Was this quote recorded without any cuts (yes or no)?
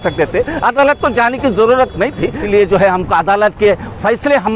no